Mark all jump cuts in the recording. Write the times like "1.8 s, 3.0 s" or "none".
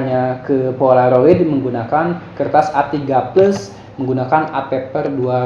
none